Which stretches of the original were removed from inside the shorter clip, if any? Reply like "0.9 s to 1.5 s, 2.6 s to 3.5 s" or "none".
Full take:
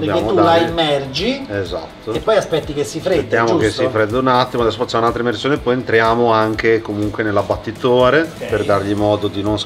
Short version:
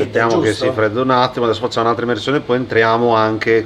none